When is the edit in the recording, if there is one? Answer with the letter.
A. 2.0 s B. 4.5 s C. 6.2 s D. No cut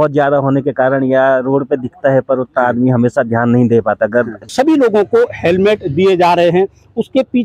B